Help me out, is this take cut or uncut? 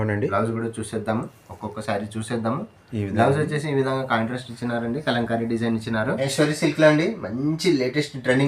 cut